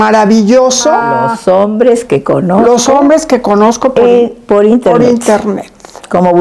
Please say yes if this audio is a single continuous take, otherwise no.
no